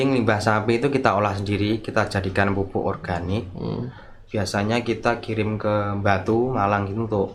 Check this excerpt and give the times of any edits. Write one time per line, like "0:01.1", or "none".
none